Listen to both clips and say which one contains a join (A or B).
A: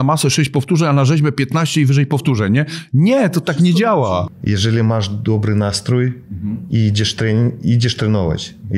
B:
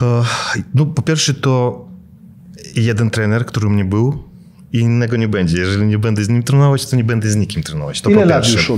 A